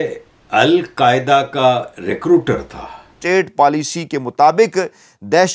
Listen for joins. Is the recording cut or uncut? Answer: cut